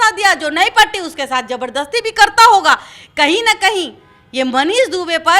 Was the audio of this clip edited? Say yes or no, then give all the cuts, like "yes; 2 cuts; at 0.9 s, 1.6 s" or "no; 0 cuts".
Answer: no; 0 cuts